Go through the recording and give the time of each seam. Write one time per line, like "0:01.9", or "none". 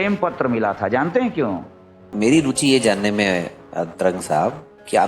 0:02.1